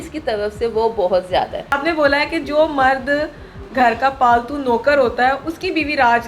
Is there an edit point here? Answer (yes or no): yes